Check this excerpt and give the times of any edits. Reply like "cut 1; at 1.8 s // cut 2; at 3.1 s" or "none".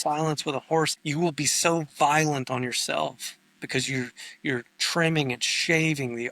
cut 1; at 1.0 s